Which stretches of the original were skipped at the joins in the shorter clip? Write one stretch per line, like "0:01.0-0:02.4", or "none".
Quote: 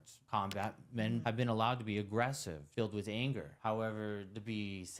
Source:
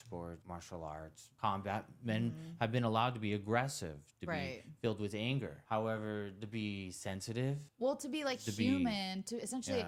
0:02.3-0:02.6
0:03.9-0:04.6